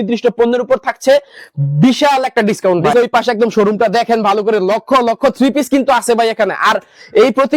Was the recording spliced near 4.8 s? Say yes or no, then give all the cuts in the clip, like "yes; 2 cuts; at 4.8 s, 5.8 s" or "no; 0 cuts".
no; 1 cut; at 2.9 s